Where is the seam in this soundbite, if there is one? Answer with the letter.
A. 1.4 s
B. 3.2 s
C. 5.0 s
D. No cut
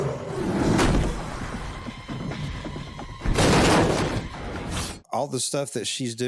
C